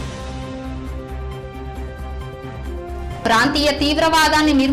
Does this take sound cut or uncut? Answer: uncut